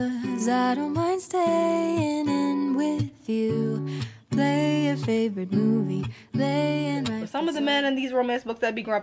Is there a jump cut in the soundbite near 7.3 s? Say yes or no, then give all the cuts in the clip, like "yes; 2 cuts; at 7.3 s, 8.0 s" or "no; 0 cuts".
yes; 1 cut; at 7.3 s